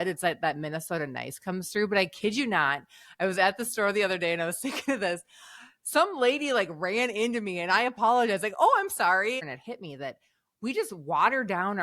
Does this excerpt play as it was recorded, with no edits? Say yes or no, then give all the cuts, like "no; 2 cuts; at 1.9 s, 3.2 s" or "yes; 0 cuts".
no; 1 cut; at 9.5 s